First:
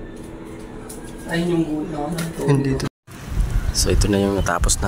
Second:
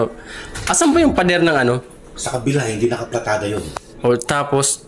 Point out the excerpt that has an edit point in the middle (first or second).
first